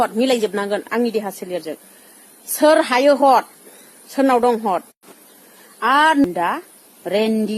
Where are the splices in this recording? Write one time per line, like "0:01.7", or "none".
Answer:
0:06.2